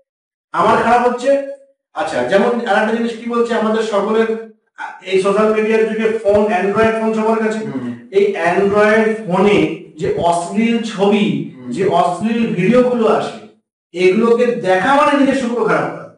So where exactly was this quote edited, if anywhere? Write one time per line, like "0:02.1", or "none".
none